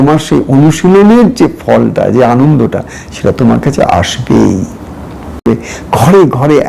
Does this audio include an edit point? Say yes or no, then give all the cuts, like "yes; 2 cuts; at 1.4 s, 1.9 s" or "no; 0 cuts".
yes; 1 cut; at 5.5 s